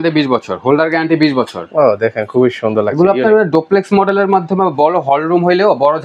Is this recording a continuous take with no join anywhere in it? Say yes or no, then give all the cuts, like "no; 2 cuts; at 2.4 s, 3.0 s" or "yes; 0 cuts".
yes; 0 cuts